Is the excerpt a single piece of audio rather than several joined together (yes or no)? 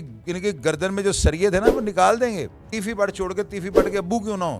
no